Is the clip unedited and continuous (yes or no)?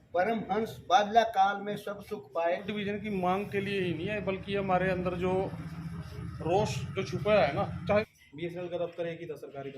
no